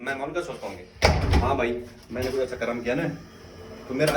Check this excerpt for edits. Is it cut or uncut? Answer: uncut